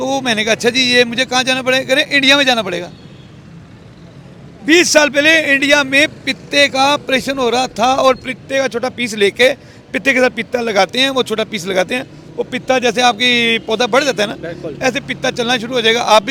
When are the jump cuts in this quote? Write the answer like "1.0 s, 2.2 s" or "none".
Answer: none